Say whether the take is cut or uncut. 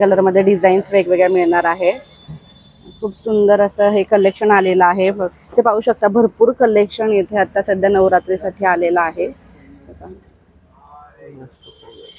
uncut